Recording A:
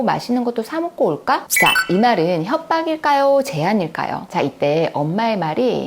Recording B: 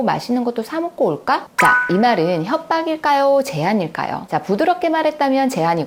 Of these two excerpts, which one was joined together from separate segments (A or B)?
A